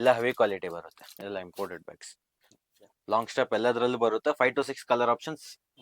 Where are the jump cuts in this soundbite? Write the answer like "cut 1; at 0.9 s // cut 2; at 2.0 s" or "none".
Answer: cut 1; at 1.0 s

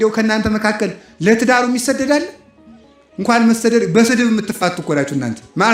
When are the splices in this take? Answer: none

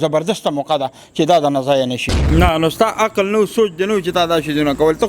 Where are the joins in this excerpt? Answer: cut 1; at 2.2 s

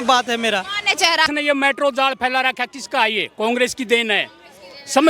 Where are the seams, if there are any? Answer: cut 1; at 1.3 s

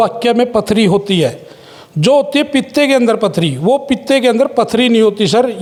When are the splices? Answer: none

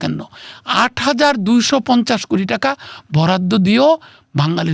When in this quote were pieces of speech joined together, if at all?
none

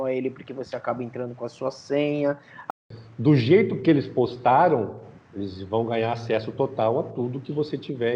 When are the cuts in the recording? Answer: cut 1; at 2.7 s

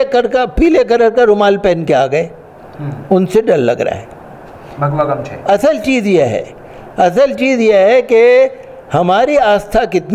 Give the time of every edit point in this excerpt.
none

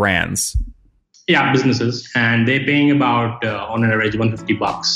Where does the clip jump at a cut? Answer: cut 1; at 2.0 s

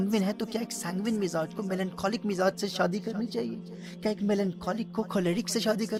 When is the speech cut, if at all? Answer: none

